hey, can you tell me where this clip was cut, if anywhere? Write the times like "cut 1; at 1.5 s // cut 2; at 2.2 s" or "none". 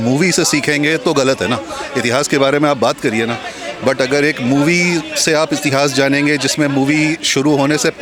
none